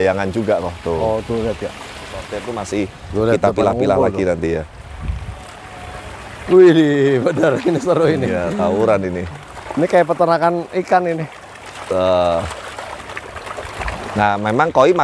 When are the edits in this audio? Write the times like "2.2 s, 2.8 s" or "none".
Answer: 2.4 s